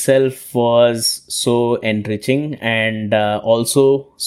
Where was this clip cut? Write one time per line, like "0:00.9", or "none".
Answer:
none

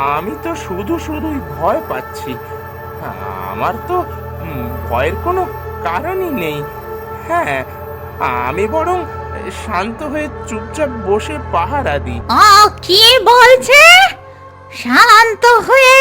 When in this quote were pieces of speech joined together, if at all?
0:12.1

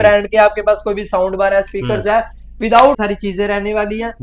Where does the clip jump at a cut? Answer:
0:02.9

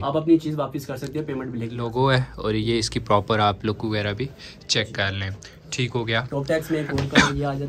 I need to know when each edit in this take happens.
0:01.8

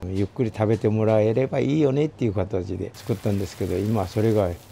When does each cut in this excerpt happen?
0:02.9

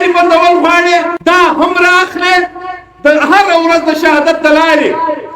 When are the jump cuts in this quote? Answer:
0:01.1

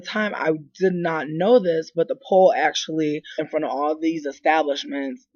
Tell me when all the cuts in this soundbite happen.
none

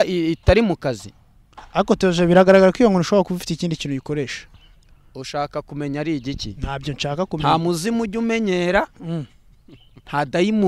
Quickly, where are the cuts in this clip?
none

